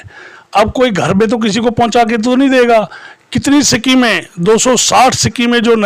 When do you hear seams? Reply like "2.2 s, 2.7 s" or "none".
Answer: none